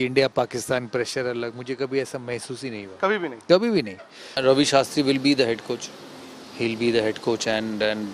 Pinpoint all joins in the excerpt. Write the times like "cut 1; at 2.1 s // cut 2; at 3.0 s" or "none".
cut 1; at 4.4 s